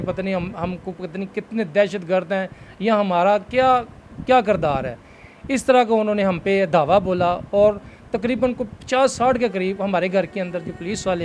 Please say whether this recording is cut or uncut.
uncut